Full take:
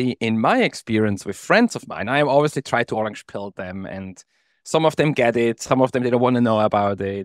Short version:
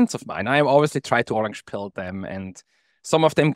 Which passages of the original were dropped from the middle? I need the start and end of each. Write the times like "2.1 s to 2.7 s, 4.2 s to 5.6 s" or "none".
none